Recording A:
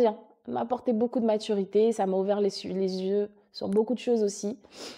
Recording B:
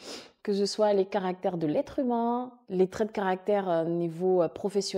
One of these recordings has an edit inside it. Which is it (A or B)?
B